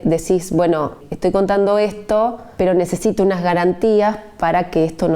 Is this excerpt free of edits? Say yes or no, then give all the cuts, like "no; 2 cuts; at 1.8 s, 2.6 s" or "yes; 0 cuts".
no; 2 cuts; at 1.0 s, 2.4 s